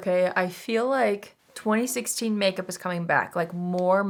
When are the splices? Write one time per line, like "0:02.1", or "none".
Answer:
none